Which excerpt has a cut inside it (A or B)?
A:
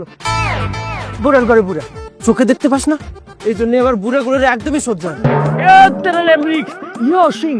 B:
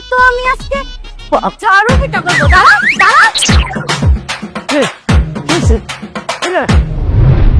B